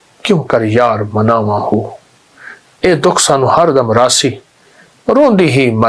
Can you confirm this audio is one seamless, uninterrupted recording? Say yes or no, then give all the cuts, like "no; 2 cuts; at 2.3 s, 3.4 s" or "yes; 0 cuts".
yes; 0 cuts